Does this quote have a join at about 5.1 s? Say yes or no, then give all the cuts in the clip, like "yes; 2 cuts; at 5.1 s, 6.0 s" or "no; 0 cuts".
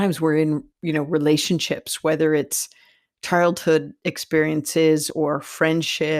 yes; 1 cut; at 5.1 s